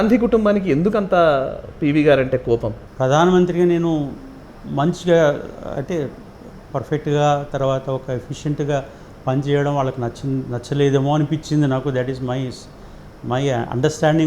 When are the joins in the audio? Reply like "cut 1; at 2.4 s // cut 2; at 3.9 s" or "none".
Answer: cut 1; at 2.8 s